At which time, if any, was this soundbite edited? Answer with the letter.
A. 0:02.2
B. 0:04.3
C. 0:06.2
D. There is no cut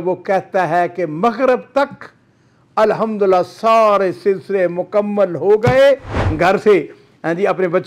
C